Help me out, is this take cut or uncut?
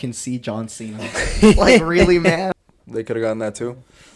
cut